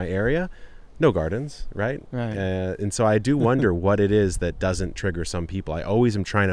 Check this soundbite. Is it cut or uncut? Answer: uncut